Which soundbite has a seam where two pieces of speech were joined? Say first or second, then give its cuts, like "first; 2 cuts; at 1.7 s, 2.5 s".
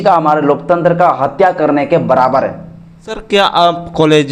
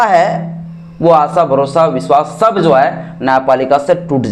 first; 1 cut; at 3.2 s